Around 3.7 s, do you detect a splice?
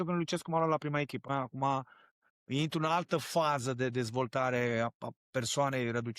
no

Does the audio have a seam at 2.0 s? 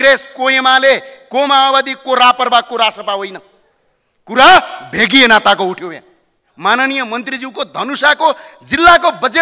no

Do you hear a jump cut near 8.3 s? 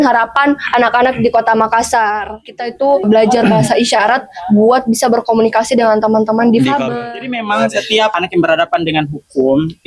no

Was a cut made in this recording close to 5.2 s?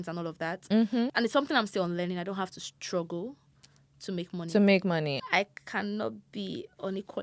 yes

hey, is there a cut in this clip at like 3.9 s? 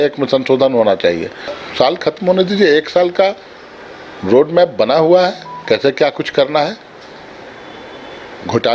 no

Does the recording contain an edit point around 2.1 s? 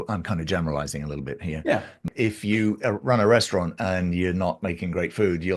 yes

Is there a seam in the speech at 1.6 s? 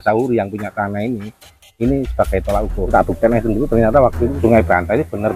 no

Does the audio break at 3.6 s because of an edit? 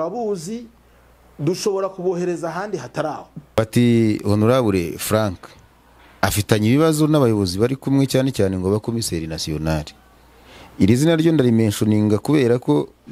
yes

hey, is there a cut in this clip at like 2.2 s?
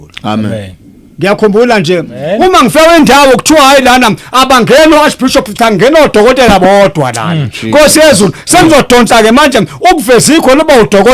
yes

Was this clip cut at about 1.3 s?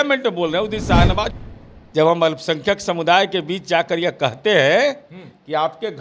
yes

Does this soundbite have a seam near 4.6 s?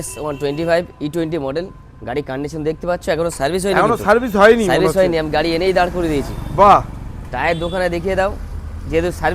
no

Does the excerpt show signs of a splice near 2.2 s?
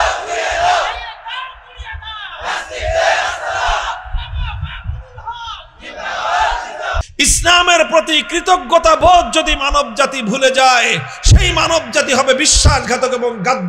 no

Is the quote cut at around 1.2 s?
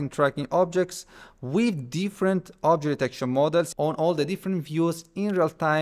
no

